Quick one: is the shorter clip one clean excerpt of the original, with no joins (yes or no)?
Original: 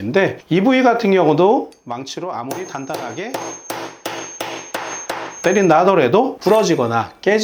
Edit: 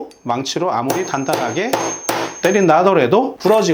no